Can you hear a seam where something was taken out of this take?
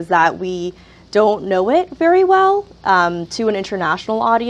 no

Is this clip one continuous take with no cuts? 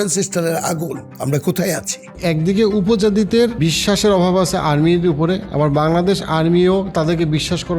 no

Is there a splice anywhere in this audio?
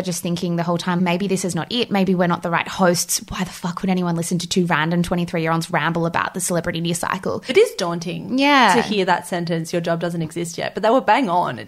yes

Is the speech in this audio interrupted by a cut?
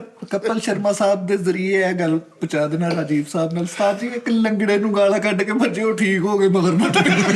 no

